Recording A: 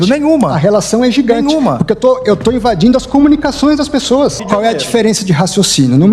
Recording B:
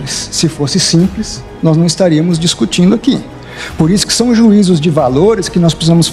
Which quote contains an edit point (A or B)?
A